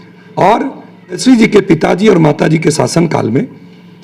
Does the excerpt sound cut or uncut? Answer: cut